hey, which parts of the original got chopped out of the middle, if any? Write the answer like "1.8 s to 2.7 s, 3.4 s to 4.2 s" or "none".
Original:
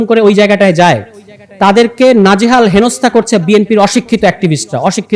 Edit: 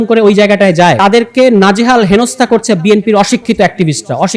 1.0 s to 1.6 s